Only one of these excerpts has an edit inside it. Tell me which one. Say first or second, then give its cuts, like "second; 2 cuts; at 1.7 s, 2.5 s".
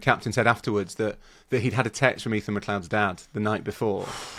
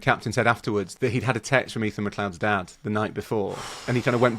second; 1 cut; at 0.9 s